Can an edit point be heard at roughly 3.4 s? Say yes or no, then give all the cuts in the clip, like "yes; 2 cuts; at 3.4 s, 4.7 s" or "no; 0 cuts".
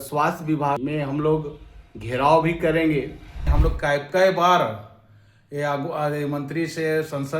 yes; 1 cut; at 3.4 s